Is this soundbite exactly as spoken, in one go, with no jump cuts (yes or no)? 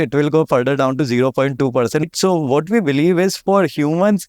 no